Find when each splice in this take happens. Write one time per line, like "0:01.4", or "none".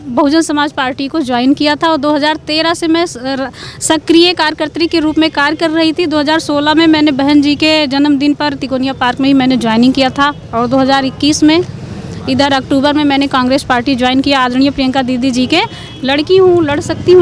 none